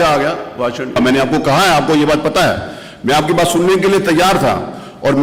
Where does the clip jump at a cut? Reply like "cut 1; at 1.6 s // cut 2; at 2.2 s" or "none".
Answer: cut 1; at 1.0 s